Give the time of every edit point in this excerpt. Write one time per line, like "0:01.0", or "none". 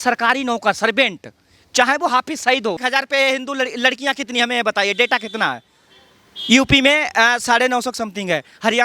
0:02.8